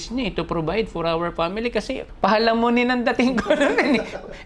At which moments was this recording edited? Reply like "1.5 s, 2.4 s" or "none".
2.0 s